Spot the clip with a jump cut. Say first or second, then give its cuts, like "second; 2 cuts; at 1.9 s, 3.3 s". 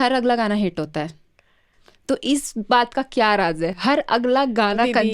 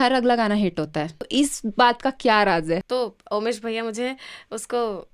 second; 2 cuts; at 1.3 s, 2.8 s